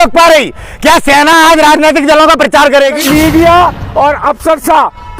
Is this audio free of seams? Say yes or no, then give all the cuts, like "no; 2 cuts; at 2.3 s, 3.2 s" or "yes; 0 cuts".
no; 1 cut; at 3.0 s